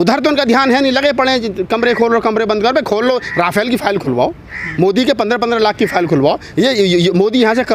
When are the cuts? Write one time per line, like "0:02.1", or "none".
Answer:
none